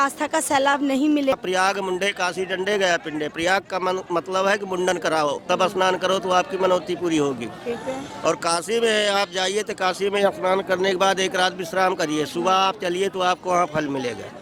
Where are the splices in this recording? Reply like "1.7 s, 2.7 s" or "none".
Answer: 1.3 s